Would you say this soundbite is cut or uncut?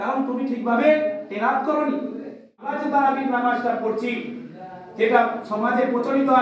cut